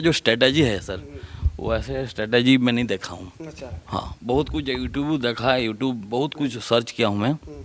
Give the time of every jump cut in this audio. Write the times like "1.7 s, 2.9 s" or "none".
none